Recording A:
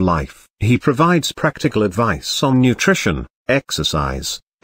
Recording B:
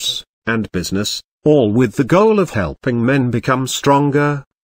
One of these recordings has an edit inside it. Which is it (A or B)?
A